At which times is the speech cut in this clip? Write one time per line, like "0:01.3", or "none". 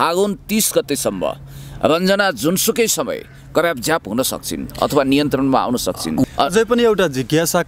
0:06.2